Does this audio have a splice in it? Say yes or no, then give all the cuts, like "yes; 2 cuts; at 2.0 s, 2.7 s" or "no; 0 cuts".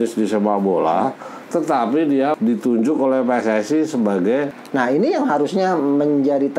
yes; 2 cuts; at 2.4 s, 4.5 s